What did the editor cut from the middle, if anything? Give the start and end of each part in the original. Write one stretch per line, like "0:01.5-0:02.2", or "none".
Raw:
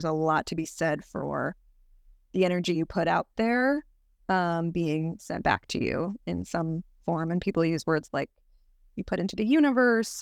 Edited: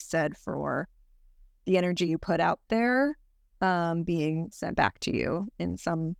none